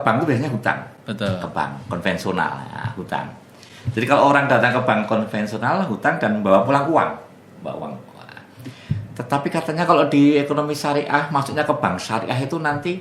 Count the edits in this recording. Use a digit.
0